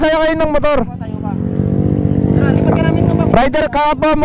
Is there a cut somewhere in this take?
no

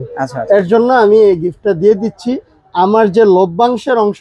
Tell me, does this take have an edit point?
no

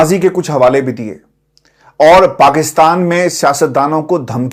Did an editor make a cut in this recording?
no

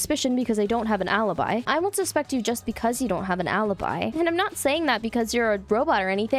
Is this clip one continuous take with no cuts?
no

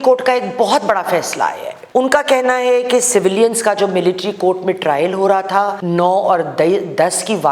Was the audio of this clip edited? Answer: yes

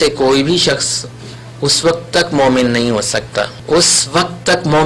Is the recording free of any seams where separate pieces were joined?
no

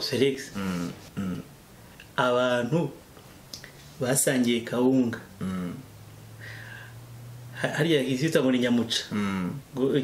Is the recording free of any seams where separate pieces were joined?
no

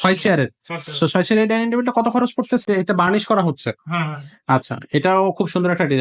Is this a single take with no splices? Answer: no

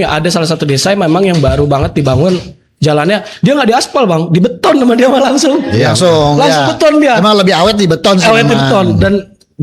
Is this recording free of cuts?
yes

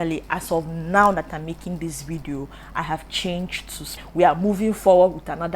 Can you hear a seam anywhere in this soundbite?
yes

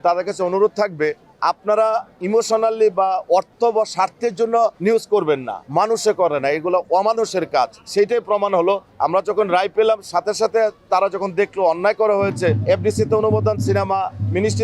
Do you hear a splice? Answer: yes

